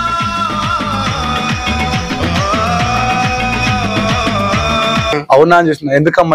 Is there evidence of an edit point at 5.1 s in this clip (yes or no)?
yes